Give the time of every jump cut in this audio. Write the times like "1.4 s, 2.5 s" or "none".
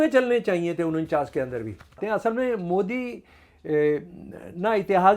2.0 s